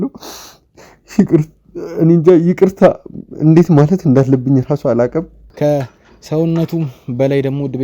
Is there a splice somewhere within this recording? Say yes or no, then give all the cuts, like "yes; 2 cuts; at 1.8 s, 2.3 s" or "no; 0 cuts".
yes; 1 cut; at 5.4 s